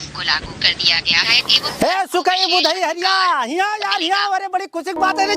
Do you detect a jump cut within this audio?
yes; 1 cut; at 1.3 s

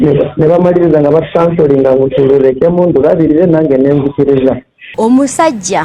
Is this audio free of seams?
no; 1 cut; at 4.9 s

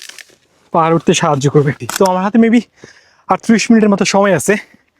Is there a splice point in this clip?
yes; 1 cut; at 1.8 s

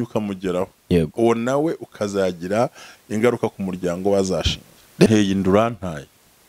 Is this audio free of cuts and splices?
no; 1 cut; at 5.1 s

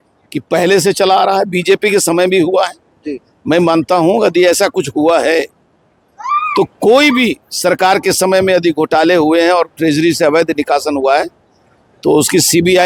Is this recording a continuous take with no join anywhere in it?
yes; 0 cuts

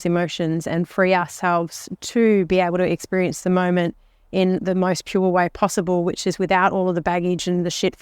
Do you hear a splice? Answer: no; 0 cuts

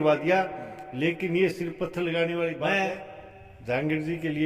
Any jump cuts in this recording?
yes; 1 cut; at 2.8 s

